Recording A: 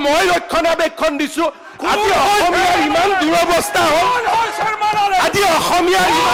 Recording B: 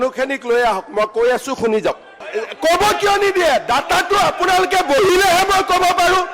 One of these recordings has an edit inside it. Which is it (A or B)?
B